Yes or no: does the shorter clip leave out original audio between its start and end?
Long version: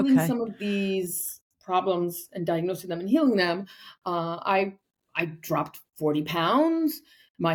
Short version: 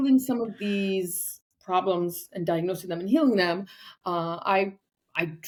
no